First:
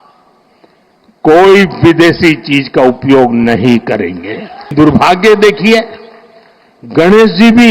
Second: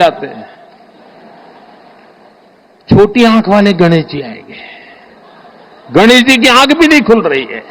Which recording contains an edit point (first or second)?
first